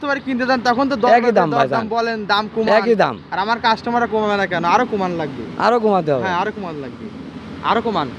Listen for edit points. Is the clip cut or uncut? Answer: uncut